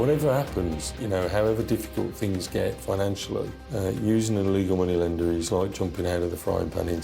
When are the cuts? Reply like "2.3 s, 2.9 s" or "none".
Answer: none